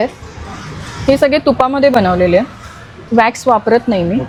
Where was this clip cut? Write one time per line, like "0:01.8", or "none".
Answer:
none